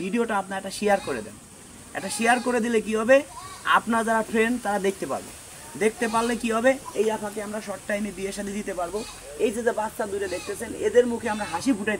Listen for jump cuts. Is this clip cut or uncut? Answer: uncut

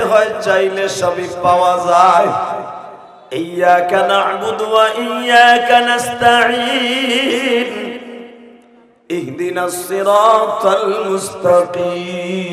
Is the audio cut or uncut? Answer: uncut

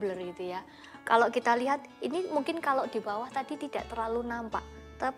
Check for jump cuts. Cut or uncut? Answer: uncut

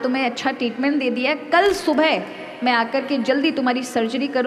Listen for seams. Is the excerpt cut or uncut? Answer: uncut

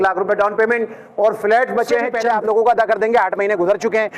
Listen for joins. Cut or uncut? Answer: cut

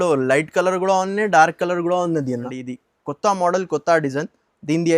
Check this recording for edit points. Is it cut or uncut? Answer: cut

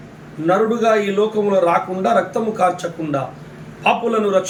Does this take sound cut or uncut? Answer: uncut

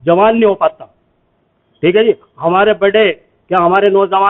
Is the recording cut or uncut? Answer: uncut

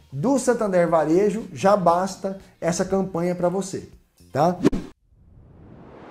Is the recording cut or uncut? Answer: cut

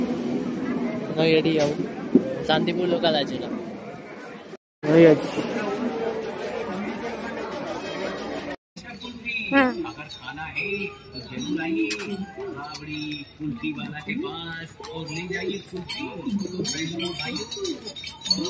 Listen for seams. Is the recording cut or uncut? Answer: cut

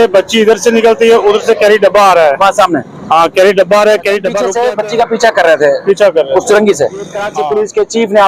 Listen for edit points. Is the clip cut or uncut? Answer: cut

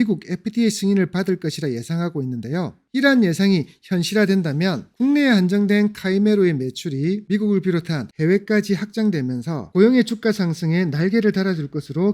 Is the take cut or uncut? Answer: uncut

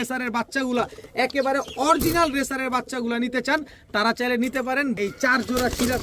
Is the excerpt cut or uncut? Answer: cut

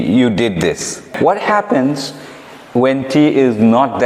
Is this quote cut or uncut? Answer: cut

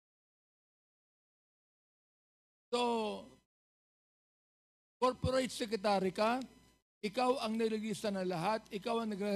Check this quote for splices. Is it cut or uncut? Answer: uncut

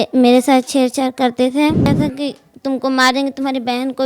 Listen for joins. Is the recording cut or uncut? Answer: cut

